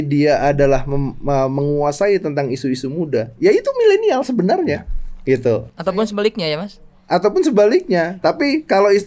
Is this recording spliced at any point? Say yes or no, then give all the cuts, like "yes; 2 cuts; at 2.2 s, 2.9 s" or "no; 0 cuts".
yes; 1 cut; at 8.1 s